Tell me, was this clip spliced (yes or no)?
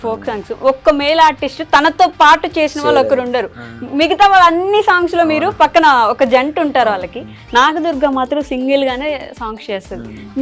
no